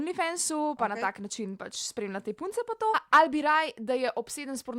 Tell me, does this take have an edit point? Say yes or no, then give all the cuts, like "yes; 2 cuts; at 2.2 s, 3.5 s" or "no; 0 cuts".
yes; 1 cut; at 3.0 s